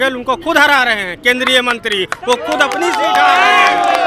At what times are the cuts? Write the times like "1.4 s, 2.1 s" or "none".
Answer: none